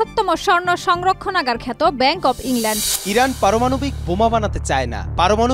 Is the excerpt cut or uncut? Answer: cut